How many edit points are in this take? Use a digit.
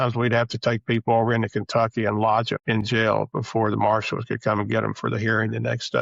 1